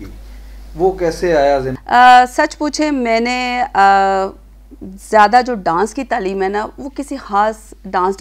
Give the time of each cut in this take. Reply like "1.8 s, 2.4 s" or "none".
1.8 s

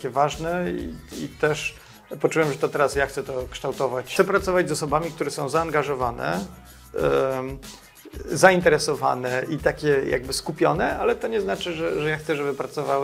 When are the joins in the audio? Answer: 4.0 s

